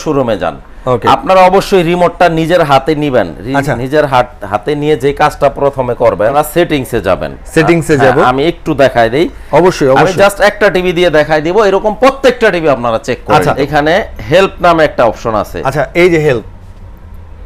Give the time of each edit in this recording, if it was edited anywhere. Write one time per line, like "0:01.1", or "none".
0:06.3
0:13.6